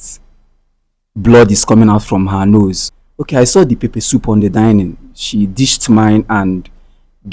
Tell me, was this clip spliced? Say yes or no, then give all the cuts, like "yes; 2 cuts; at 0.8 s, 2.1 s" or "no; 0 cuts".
yes; 1 cut; at 2.9 s